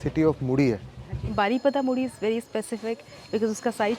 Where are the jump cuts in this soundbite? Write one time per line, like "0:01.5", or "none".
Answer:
0:01.2